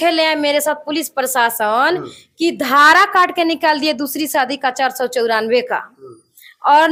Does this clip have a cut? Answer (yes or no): no